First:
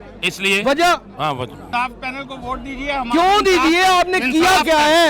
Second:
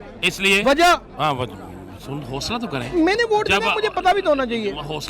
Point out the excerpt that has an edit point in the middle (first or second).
first